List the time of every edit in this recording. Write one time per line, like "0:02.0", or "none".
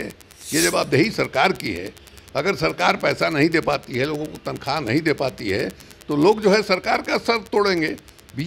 none